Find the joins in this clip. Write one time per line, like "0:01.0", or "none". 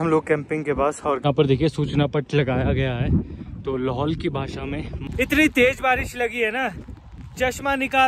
0:01.2
0:05.0